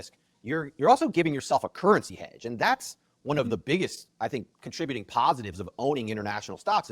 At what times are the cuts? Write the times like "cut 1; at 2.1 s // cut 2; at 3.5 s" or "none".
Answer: none